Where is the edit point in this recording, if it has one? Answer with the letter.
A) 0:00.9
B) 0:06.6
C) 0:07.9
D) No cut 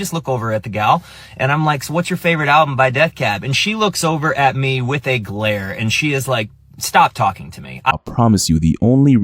C